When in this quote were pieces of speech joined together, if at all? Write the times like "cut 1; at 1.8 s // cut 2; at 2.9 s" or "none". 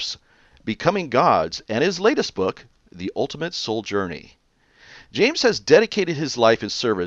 cut 1; at 1.0 s

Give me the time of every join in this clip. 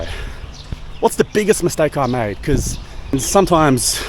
cut 1; at 3.1 s

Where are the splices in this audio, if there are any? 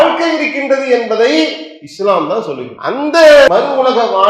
cut 1; at 2.7 s // cut 2; at 3.5 s

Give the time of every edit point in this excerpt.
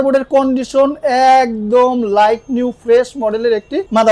none

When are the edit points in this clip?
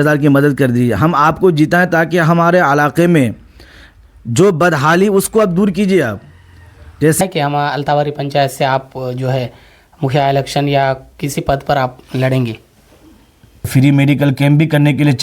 cut 1; at 7.2 s // cut 2; at 13.7 s

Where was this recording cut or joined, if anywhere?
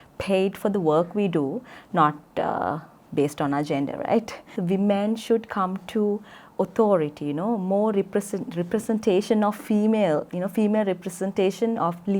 cut 1; at 4.5 s

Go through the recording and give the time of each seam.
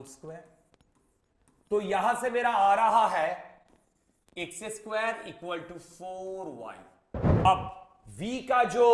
cut 1; at 7.4 s

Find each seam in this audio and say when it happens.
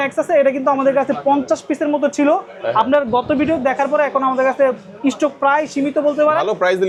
none

